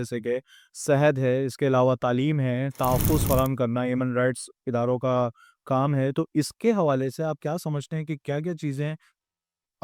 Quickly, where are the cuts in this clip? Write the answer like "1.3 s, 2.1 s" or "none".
none